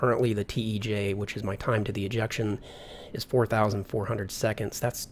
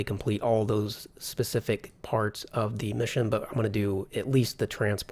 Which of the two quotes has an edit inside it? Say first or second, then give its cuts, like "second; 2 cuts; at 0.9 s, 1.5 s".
second; 1 cut; at 3.4 s